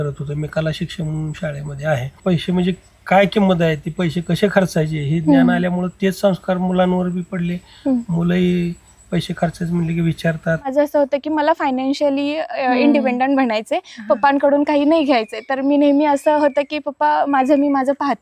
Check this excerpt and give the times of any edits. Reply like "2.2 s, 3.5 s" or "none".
2.2 s, 10.7 s